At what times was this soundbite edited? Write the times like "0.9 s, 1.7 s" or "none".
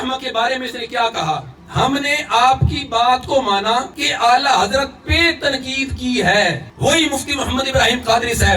1.6 s, 4.0 s, 6.7 s